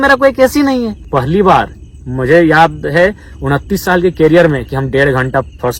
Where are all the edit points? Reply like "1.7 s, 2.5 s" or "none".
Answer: 1.0 s